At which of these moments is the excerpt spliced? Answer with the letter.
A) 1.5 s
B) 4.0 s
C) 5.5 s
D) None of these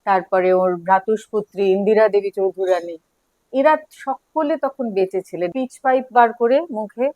C